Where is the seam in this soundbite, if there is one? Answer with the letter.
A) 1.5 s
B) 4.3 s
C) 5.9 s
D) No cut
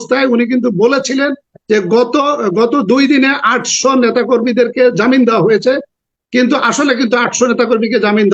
D